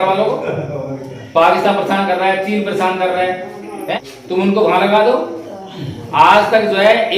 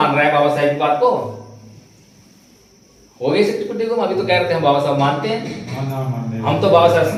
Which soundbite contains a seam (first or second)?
first